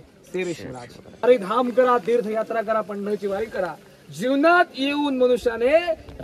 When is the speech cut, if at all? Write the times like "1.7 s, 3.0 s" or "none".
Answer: 1.2 s